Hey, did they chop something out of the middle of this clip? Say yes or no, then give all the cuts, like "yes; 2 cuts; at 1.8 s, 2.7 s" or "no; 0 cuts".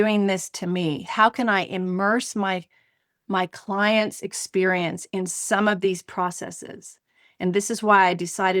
yes; 1 cut; at 1.0 s